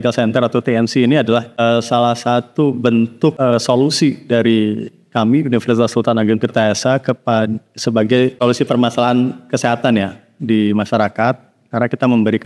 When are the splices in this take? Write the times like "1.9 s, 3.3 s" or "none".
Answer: 1.5 s, 3.4 s, 8.3 s